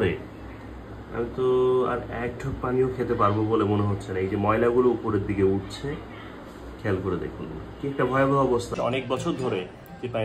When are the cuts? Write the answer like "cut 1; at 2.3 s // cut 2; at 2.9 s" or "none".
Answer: cut 1; at 8.7 s